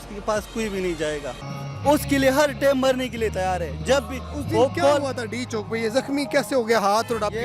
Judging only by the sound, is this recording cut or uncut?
cut